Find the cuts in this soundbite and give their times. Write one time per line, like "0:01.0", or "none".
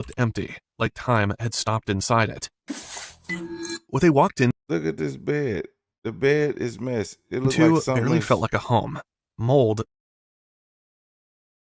none